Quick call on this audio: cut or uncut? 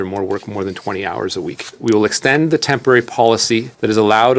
cut